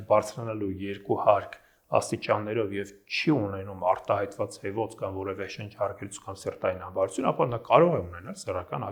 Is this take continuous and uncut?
yes; 0 cuts

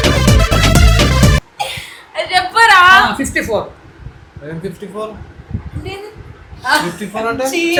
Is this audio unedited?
yes; 0 cuts

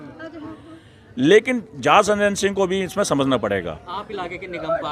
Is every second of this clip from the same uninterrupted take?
yes; 0 cuts

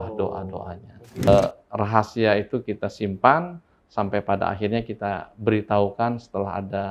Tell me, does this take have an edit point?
yes; 1 cut; at 1.3 s

